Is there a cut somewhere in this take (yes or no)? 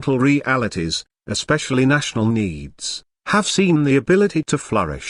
no